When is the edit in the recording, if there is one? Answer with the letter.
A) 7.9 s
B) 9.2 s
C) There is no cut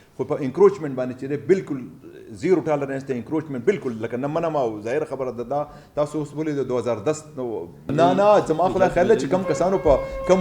A